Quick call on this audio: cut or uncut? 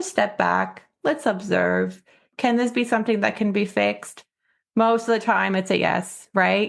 cut